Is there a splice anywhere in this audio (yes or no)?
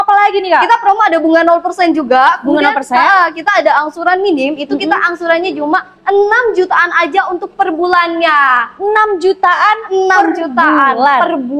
no